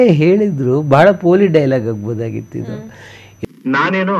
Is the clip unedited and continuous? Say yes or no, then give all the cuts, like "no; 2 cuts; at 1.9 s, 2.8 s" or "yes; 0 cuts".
yes; 0 cuts